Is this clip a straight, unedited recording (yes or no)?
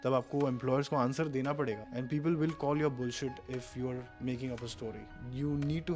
yes